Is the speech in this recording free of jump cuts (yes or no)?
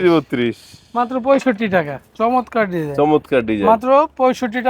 no